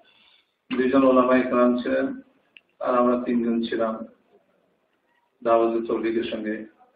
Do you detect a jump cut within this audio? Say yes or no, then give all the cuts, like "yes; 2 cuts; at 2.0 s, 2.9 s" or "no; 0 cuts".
no; 0 cuts